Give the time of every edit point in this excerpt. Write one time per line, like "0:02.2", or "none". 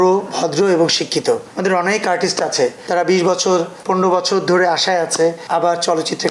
0:01.5